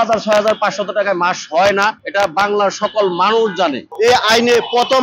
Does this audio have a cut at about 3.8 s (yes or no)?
yes